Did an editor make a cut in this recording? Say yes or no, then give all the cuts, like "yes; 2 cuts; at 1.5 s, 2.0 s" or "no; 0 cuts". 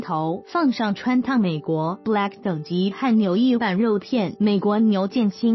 no; 0 cuts